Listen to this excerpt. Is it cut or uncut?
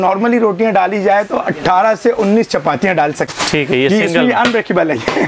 cut